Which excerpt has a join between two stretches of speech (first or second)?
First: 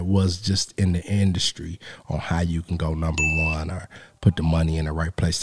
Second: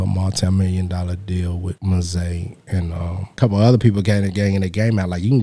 second